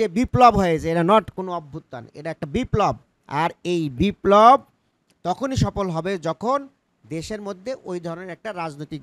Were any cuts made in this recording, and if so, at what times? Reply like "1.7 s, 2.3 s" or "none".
3.1 s